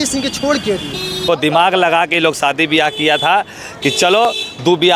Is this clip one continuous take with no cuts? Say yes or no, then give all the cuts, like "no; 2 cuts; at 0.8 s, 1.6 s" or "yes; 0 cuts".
no; 1 cut; at 1.3 s